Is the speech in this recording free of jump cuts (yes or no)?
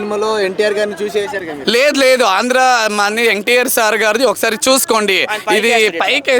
yes